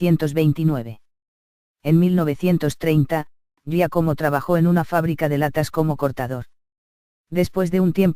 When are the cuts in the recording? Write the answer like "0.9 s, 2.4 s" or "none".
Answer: 3.1 s